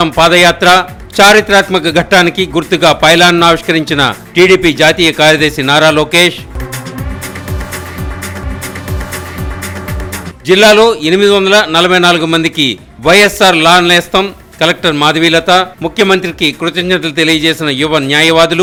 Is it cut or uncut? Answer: uncut